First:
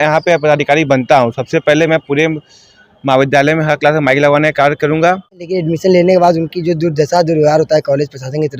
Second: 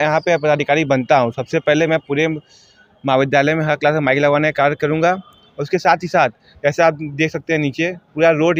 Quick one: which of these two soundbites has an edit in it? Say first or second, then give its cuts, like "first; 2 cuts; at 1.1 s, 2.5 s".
first; 1 cut; at 5.6 s